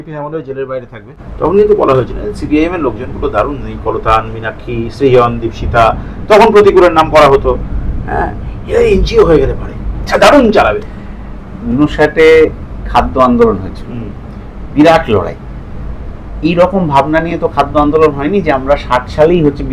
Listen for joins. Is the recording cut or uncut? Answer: cut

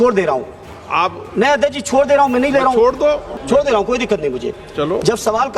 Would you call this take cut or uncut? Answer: cut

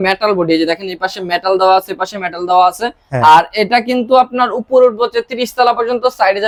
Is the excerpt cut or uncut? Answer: uncut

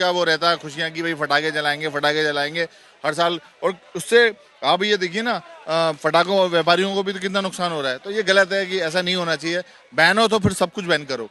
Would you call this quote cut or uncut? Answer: uncut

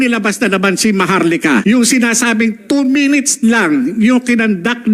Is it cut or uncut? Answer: cut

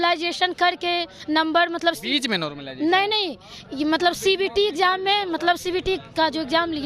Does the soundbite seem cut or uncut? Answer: uncut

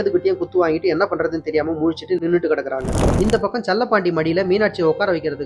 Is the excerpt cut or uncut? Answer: cut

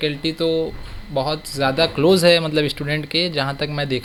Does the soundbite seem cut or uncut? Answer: uncut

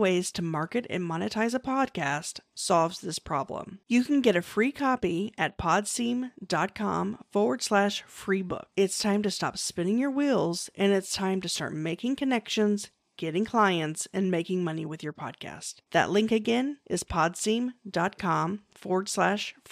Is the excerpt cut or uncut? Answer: uncut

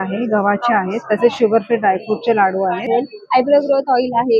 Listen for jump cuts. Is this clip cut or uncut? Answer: cut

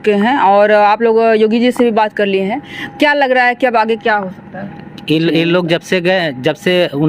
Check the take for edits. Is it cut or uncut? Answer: uncut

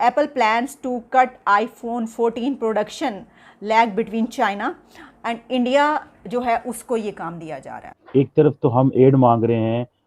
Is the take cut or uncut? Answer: cut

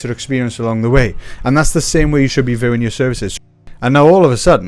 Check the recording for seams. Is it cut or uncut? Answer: cut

